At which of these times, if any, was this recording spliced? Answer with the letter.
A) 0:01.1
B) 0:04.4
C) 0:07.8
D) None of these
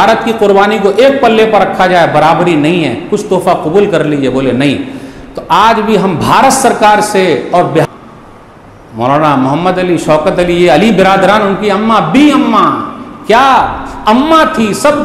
C